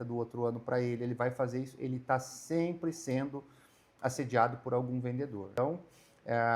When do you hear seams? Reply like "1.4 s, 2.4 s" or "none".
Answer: 5.5 s